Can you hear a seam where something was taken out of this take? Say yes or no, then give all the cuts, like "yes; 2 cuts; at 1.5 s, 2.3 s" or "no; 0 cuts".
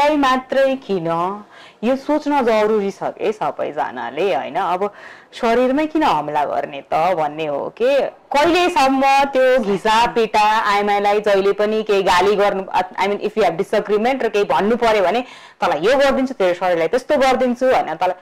no; 0 cuts